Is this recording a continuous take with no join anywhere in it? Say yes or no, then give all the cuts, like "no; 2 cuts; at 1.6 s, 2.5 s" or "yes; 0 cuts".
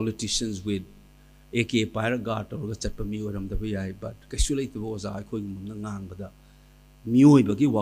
yes; 0 cuts